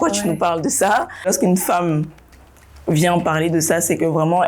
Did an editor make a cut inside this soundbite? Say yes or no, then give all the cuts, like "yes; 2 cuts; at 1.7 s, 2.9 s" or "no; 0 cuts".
yes; 1 cut; at 1.3 s